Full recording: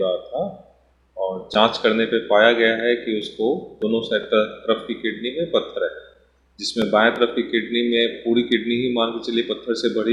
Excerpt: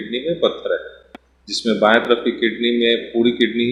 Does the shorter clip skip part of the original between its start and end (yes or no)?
no